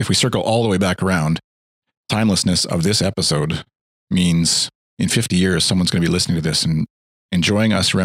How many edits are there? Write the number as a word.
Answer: zero